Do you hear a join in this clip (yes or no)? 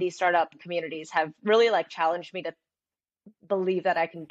no